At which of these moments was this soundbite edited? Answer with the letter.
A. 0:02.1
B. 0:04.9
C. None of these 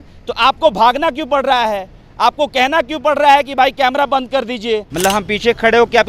B